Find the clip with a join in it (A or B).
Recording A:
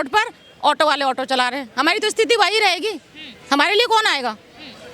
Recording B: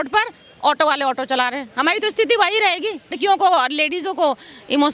B